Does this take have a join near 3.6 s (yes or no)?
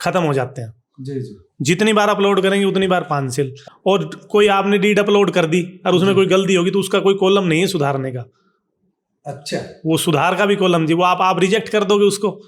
yes